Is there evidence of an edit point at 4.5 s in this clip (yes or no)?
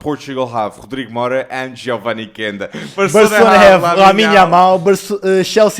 no